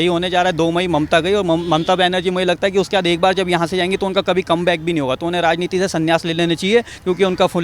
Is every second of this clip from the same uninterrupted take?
yes; 0 cuts

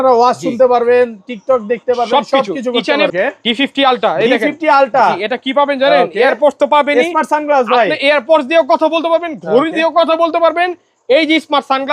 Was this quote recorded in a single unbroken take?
no; 1 cut; at 3.1 s

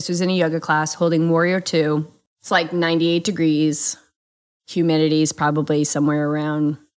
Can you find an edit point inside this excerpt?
yes; 1 cut; at 2.2 s

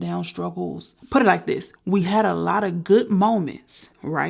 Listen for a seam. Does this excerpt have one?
yes; 1 cut; at 1.0 s

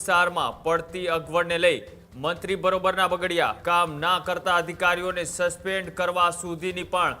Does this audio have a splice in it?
yes; 1 cut; at 3.6 s

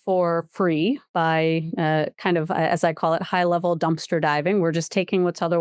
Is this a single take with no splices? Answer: yes; 0 cuts

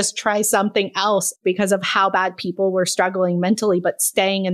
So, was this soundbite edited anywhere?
yes; 1 cut; at 1.4 s

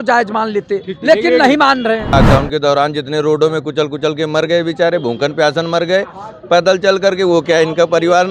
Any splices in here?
yes; 1 cut; at 2.1 s

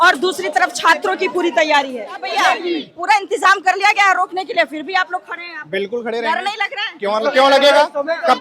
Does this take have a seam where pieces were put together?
yes; 1 cut; at 2.4 s

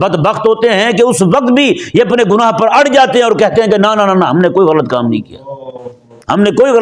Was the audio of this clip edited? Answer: no; 0 cuts

